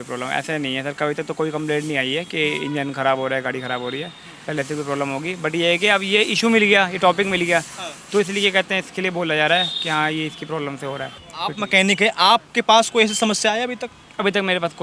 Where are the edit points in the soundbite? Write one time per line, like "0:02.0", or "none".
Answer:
0:11.2